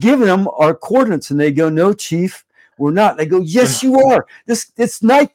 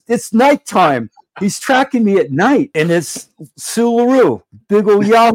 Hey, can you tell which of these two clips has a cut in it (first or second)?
second